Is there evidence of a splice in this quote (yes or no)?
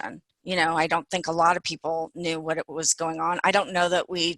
no